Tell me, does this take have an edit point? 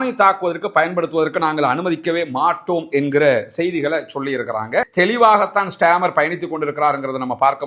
yes; 1 cut; at 4.9 s

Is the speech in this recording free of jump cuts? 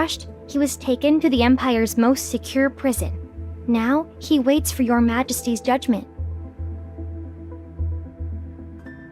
no; 1 cut; at 6.1 s

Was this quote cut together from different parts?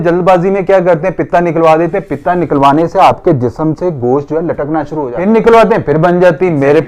yes; 1 cut; at 5.1 s

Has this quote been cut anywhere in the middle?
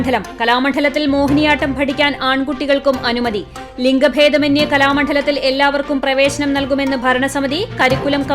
no; 0 cuts

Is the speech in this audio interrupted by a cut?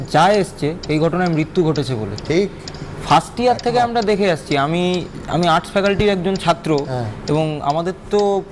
no; 0 cuts

